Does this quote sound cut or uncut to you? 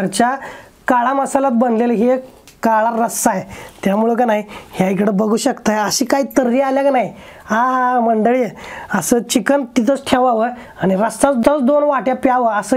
uncut